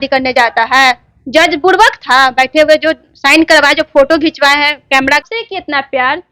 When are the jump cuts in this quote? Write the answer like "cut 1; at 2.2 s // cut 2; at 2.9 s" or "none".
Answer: cut 1; at 5.2 s